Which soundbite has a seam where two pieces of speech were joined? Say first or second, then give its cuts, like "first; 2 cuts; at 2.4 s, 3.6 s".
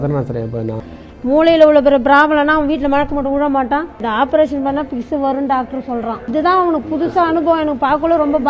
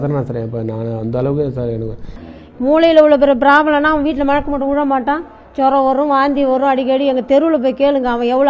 first; 3 cuts; at 0.8 s, 4.0 s, 6.3 s